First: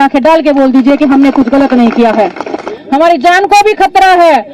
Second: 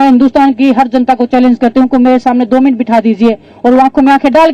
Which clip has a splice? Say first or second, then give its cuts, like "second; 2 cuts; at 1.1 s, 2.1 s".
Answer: first; 1 cut; at 2.7 s